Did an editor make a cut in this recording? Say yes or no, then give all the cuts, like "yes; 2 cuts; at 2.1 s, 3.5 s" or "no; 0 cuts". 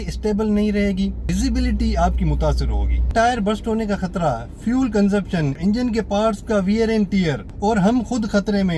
yes; 4 cuts; at 1.3 s, 3.1 s, 5.6 s, 7.4 s